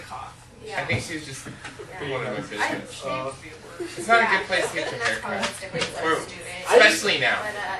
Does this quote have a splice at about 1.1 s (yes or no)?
no